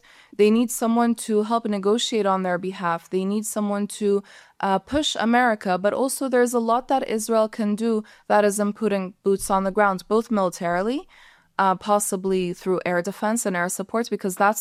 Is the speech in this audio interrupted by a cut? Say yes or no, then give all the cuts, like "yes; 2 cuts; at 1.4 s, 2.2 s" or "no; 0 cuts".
no; 0 cuts